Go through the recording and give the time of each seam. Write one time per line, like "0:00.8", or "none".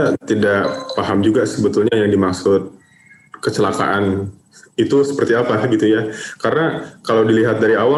none